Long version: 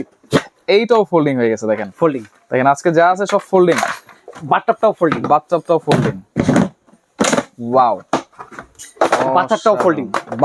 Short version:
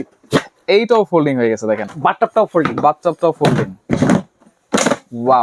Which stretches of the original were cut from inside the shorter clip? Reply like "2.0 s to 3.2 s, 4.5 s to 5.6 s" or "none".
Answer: 1.9 s to 4.3 s